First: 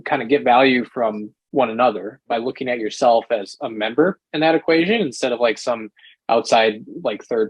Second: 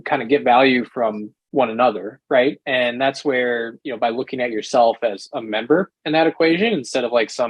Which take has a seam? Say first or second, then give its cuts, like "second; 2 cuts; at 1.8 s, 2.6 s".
first; 1 cut; at 2.1 s